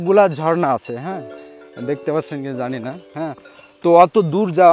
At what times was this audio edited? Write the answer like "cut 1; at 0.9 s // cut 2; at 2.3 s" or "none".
none

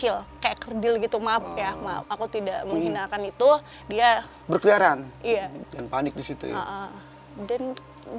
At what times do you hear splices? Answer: cut 1; at 5.5 s

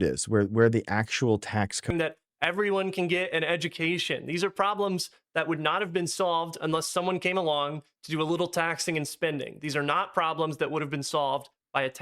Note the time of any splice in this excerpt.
cut 1; at 1.9 s

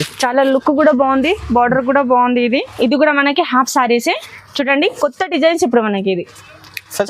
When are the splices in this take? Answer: cut 1; at 2.7 s

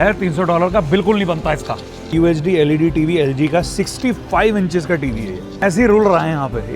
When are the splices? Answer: cut 1; at 2.1 s // cut 2; at 5.6 s

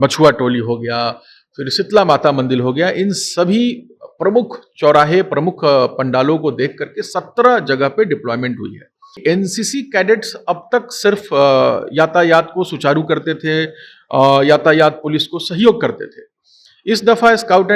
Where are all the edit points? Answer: cut 1; at 9.2 s

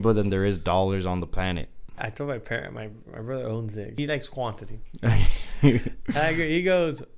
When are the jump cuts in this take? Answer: cut 1; at 2.0 s // cut 2; at 3.9 s

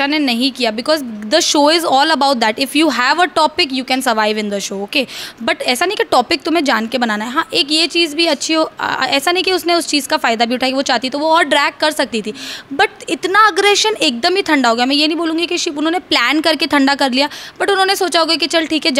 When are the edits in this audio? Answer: none

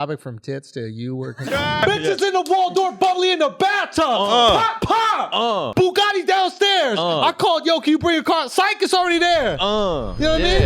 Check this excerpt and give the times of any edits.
cut 1; at 1.8 s // cut 2; at 5.7 s

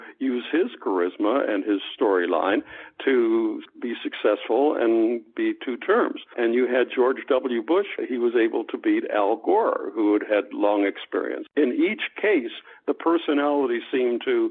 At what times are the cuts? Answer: cut 1; at 3.7 s // cut 2; at 6.3 s // cut 3; at 7.9 s // cut 4; at 11.4 s

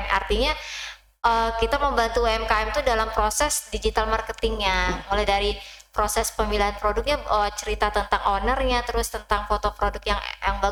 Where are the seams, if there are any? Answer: none

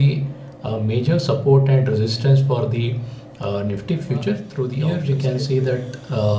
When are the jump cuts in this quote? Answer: cut 1; at 4.8 s

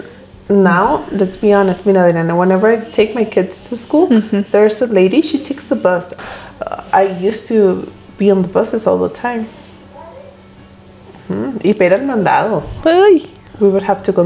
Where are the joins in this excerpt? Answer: cut 1; at 6.2 s

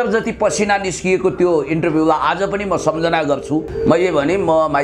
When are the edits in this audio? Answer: cut 1; at 3.7 s

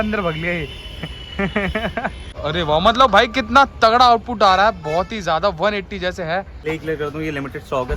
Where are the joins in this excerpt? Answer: cut 1; at 2.3 s // cut 2; at 6.6 s

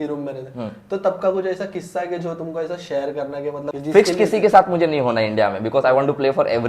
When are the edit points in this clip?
cut 1; at 3.7 s

